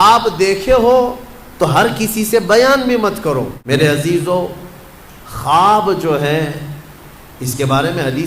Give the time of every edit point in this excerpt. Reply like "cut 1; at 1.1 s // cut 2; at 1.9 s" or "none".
cut 1; at 3.6 s